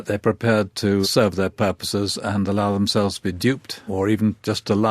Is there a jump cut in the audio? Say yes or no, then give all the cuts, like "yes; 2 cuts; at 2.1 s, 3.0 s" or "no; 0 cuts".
yes; 2 cuts; at 1.0 s, 3.8 s